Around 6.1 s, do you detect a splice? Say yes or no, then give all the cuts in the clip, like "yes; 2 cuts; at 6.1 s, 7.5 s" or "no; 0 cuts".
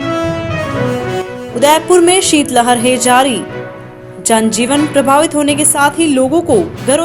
no; 1 cut; at 1.0 s